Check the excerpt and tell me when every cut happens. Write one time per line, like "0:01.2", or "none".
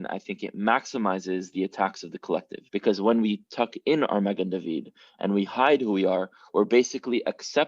0:02.6